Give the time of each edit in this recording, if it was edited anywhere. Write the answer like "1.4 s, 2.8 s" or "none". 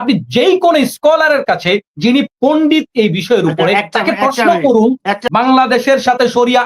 5.2 s